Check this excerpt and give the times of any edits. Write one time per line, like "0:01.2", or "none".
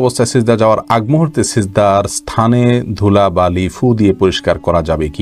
none

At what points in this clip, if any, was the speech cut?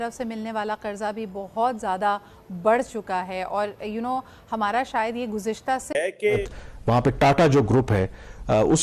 0:06.3

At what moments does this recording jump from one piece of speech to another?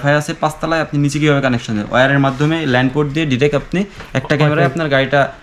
none

